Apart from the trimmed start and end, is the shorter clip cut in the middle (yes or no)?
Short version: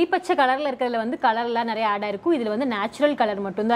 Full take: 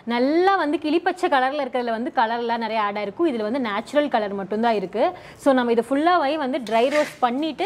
no